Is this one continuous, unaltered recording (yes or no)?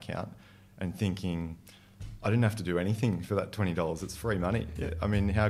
yes